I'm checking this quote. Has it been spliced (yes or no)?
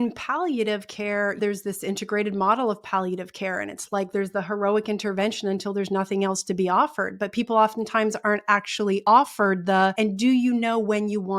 yes